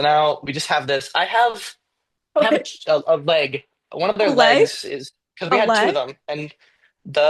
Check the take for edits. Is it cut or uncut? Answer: uncut